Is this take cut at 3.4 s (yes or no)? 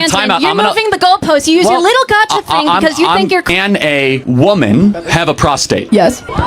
yes